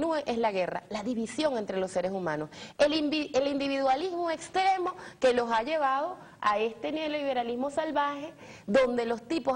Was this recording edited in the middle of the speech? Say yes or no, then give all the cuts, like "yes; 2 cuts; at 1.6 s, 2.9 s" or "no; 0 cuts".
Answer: yes; 1 cut; at 6.2 s